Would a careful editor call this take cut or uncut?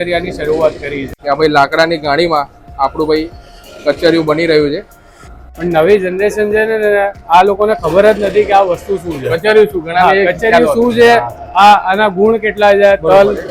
cut